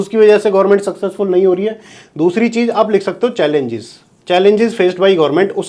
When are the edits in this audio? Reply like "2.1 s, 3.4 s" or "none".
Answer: none